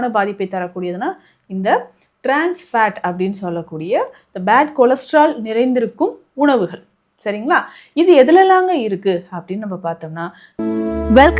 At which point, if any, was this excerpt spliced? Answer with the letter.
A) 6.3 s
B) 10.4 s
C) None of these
B